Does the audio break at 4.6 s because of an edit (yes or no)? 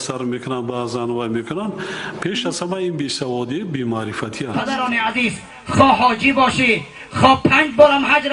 yes